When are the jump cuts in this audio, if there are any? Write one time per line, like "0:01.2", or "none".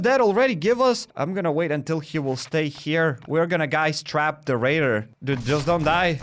0:01.1
0:05.1